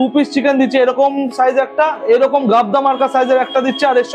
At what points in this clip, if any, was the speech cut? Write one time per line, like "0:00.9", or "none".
0:02.0